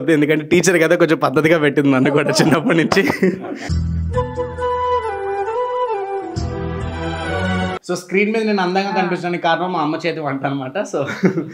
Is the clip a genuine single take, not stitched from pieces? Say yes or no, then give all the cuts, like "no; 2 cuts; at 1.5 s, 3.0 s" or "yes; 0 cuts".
no; 1 cut; at 7.8 s